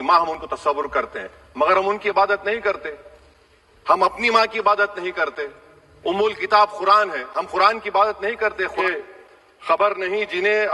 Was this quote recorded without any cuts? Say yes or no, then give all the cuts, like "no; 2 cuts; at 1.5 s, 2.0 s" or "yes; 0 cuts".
no; 1 cut; at 8.7 s